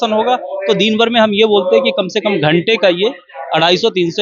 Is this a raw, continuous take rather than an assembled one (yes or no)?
yes